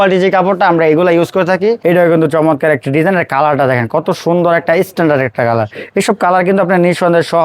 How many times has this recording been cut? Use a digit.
1